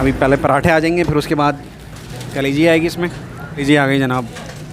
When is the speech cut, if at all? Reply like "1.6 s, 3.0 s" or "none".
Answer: 3.6 s

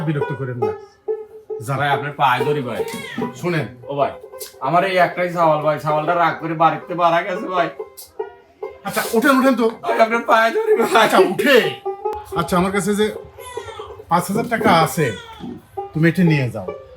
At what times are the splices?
12.2 s

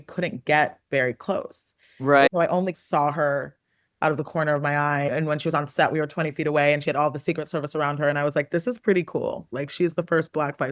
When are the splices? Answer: none

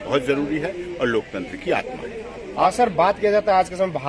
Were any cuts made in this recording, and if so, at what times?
2.6 s

